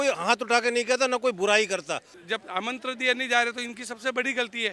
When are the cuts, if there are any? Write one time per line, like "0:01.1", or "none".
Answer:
0:02.1